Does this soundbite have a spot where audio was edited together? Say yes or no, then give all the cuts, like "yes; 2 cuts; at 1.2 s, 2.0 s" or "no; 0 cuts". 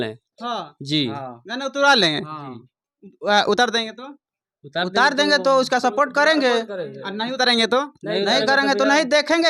no; 0 cuts